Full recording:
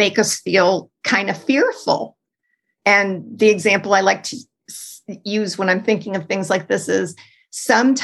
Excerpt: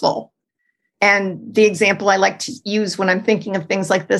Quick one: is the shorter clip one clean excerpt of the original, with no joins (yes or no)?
no